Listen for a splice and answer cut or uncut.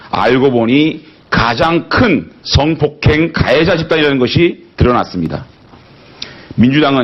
cut